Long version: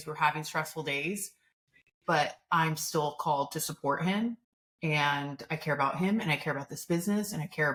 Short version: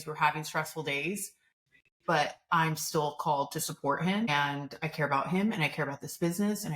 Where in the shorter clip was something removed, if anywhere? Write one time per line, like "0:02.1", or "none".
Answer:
0:04.3